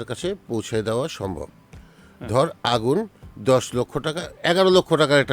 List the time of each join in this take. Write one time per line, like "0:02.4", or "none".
none